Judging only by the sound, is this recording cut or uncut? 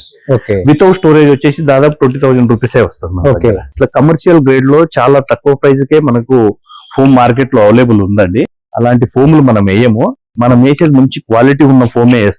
cut